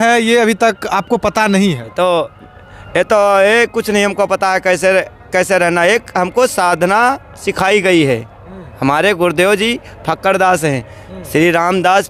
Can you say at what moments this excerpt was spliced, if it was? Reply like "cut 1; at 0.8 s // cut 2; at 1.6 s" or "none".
none